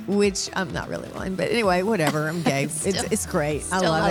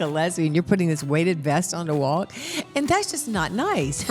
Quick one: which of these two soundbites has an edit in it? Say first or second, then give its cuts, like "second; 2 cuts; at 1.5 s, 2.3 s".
second; 1 cut; at 2.6 s